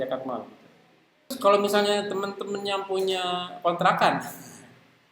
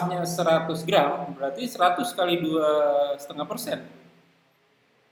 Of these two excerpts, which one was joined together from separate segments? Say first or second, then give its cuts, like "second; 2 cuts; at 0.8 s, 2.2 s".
first; 1 cut; at 1.3 s